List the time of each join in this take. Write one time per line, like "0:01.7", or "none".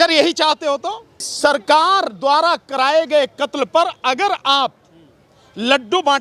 0:01.3

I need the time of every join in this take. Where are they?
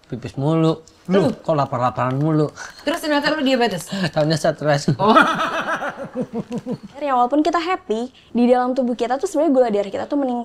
0:07.0

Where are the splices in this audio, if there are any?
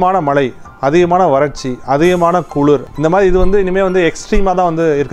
0:02.9

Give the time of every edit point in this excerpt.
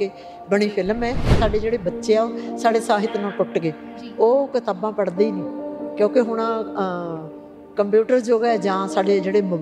0:01.3

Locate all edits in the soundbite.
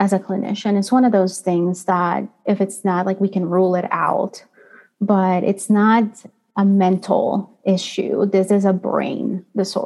0:02.3

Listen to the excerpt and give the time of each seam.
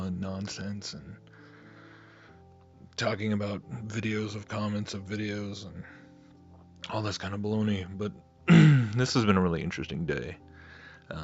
0:06.7

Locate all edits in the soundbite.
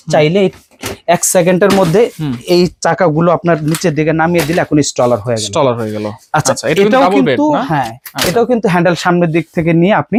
none

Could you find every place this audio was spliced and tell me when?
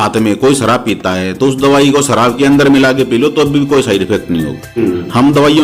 0:04.7

